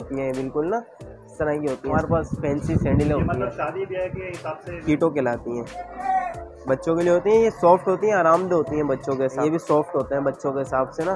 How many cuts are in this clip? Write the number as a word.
three